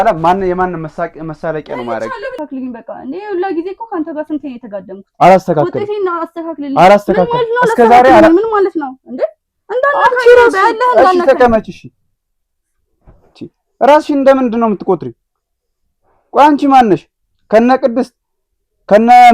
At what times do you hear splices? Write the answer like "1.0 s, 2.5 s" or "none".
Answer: 2.4 s